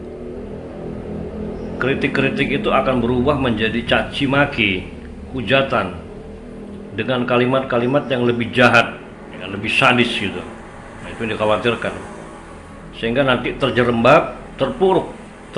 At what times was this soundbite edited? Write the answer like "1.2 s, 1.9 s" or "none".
none